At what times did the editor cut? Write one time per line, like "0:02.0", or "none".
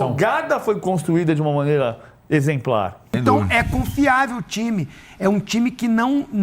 0:03.1